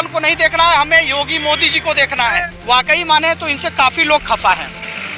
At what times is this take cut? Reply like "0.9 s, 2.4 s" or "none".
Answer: 2.5 s